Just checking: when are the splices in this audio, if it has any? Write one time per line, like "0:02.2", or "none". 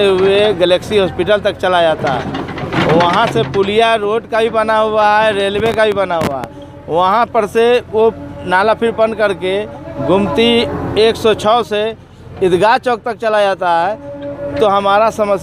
none